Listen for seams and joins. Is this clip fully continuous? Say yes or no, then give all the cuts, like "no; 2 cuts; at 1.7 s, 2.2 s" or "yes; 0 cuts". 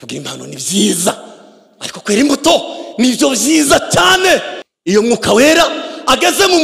no; 1 cut; at 4.6 s